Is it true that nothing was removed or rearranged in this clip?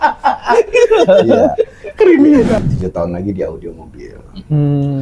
no; 1 cut; at 2.5 s

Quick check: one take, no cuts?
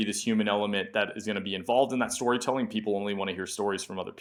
yes; 0 cuts

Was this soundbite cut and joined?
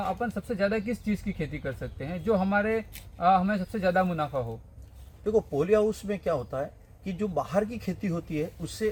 no; 0 cuts

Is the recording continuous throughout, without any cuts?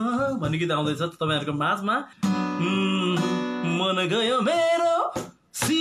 no; 1 cut; at 2.1 s

